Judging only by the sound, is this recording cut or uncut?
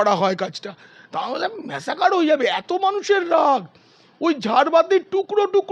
uncut